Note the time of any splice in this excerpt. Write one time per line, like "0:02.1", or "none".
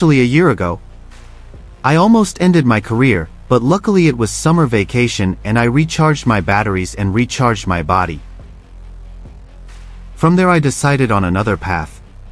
0:08.7
0:10.1